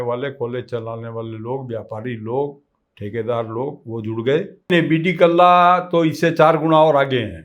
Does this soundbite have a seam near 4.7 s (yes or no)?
yes